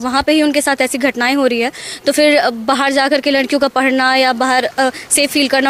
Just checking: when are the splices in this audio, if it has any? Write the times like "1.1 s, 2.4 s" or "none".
none